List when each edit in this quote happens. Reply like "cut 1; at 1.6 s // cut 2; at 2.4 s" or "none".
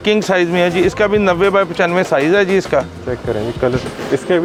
none